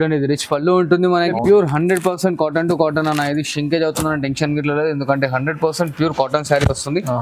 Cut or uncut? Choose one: cut